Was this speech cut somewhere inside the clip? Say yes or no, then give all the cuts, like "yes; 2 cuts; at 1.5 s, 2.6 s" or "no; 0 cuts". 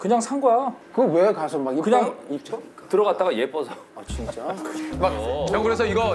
yes; 1 cut; at 5.2 s